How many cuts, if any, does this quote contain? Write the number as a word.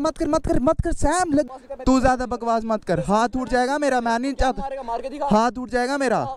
one